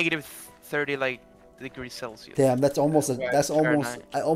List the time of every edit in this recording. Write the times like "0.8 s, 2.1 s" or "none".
2.2 s